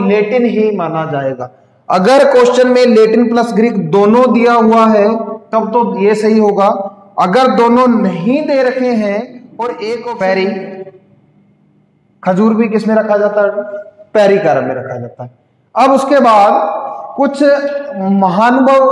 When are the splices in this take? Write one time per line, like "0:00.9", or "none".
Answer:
0:10.1